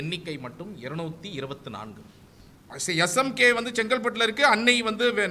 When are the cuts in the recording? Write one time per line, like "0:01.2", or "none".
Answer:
0:02.6